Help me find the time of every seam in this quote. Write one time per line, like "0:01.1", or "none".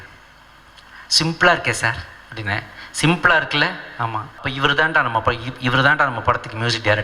0:04.5

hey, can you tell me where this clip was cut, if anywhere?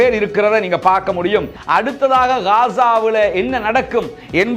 0:01.6

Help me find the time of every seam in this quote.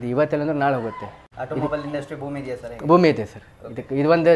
0:01.2

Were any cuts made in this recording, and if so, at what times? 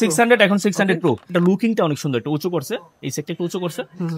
0:01.3

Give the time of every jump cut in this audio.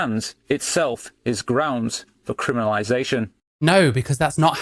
none

